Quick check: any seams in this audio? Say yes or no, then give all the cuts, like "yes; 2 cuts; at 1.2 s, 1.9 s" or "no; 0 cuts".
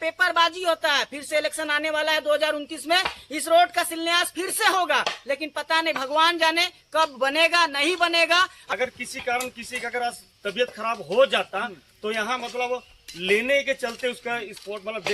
yes; 1 cut; at 8.6 s